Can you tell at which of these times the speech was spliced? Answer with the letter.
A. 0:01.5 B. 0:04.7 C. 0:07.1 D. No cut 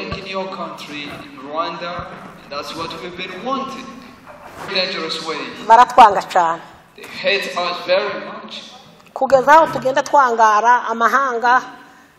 B